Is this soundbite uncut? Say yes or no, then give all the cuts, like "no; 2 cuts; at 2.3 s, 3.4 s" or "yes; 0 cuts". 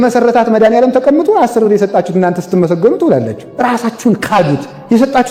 yes; 0 cuts